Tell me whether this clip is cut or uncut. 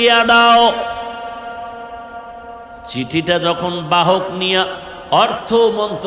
uncut